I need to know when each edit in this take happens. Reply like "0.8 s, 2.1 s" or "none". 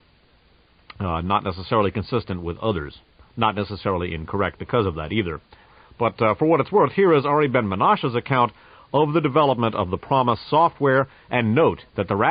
5.0 s